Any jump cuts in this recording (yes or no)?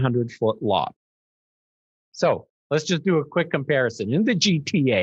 no